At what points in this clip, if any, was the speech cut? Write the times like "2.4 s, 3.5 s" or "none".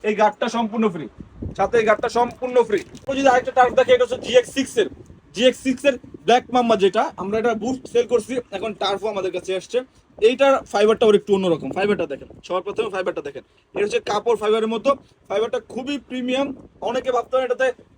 2.9 s